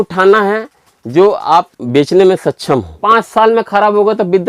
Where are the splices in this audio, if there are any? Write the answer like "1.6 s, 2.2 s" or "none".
1.8 s, 2.9 s